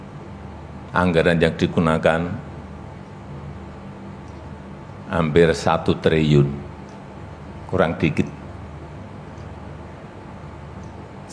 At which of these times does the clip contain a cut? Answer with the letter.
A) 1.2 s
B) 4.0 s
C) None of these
C